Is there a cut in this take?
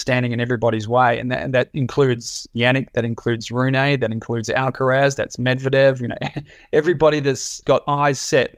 yes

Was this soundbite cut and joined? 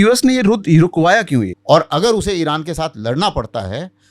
yes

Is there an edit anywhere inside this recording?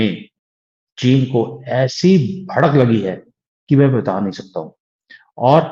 no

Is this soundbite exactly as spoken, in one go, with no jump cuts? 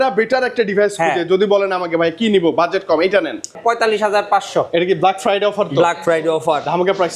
no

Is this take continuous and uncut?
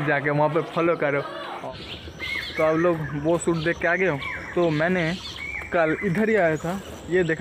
no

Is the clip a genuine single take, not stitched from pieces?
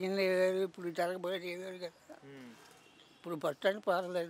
yes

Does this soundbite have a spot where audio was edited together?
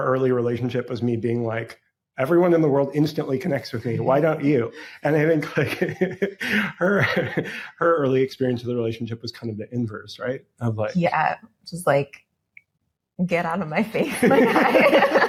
no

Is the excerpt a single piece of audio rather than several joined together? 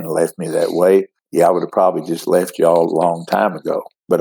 no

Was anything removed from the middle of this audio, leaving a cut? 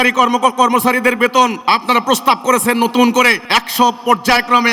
yes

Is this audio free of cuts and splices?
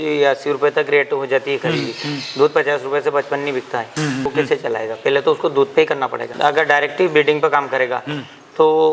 no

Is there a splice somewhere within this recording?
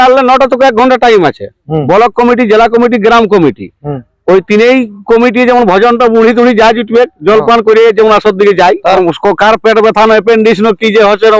yes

